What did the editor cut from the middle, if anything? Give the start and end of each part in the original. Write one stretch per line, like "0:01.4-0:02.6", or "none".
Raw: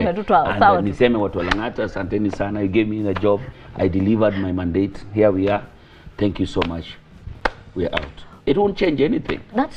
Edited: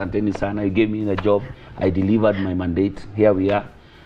none

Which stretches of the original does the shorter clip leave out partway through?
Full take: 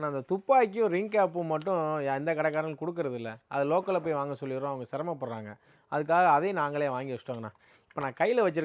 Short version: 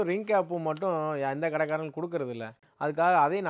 0:03.4-0:05.6

